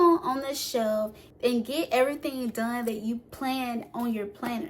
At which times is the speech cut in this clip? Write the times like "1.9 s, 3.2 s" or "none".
1.2 s

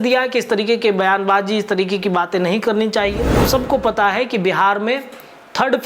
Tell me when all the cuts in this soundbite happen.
3.4 s

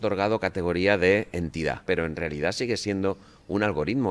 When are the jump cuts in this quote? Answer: 1.8 s

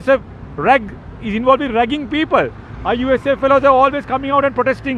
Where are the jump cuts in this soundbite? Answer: none

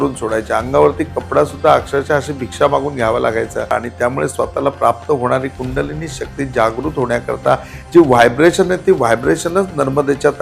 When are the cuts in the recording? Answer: 3.7 s

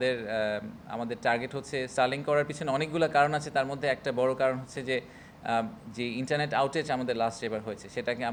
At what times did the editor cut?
none

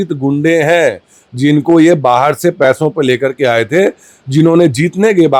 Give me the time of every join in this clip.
none

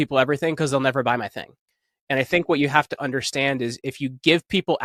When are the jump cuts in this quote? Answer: none

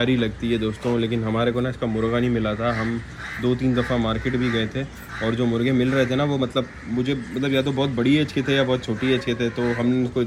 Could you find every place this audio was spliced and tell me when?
none

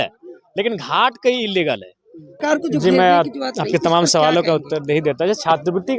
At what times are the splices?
2.3 s

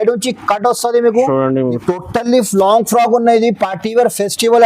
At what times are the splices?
1.8 s

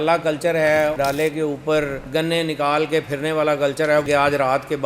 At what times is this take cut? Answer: 1.0 s, 4.1 s

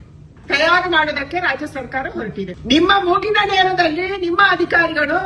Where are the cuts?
2.6 s

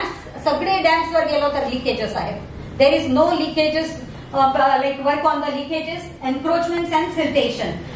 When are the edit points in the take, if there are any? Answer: none

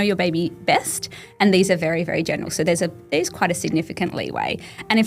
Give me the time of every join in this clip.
none

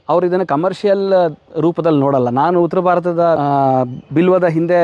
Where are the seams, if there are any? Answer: 3.4 s

